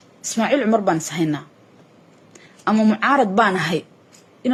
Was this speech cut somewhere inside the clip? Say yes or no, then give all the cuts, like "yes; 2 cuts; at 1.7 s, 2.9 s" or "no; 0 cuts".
no; 0 cuts